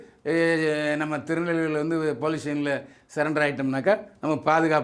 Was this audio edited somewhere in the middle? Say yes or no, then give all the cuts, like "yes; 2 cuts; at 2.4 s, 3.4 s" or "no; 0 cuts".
no; 0 cuts